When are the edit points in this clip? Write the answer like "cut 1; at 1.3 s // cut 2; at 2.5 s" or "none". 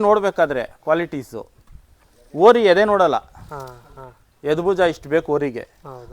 none